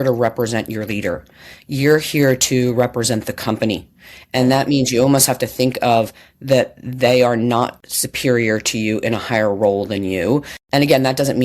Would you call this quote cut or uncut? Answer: cut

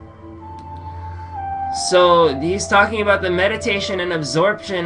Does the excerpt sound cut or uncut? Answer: cut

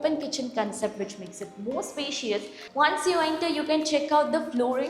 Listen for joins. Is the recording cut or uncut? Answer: cut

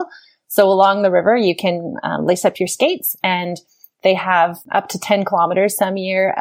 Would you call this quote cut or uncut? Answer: cut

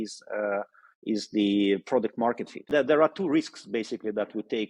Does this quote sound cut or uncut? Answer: cut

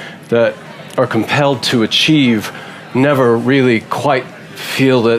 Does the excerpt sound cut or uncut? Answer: uncut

